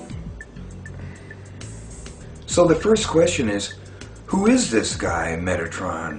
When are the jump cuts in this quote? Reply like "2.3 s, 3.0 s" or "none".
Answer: 1.1 s